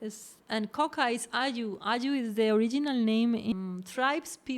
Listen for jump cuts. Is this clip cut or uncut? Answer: cut